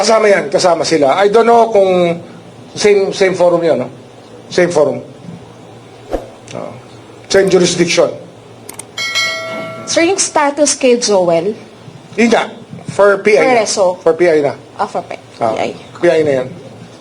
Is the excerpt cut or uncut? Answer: uncut